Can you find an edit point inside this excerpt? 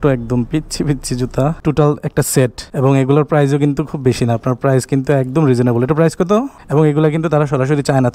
yes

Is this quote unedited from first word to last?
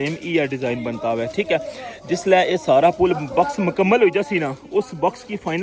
yes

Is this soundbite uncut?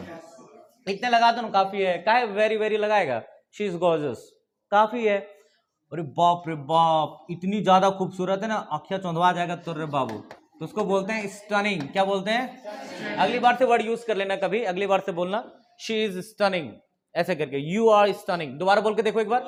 yes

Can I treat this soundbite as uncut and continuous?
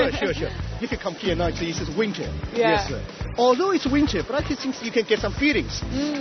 yes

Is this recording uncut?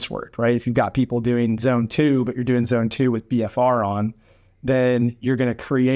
yes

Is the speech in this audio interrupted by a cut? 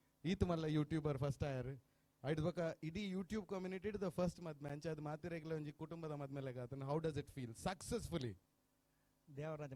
no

